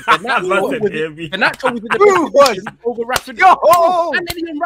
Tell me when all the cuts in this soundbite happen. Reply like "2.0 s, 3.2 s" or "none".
none